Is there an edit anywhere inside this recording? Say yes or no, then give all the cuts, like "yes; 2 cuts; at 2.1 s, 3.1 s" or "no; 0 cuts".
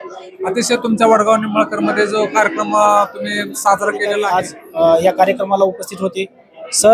yes; 1 cut; at 4.2 s